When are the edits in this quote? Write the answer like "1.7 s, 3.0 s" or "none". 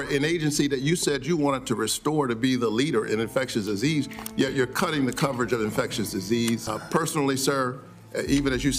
6.7 s